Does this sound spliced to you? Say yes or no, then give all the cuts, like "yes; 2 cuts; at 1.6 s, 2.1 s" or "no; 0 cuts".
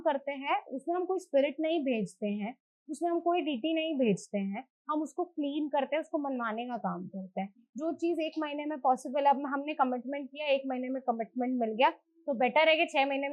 no; 0 cuts